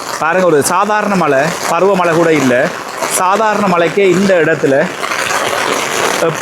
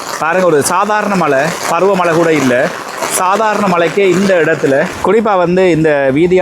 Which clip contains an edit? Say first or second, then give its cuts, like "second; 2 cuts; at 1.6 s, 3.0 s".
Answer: second; 1 cut; at 4.9 s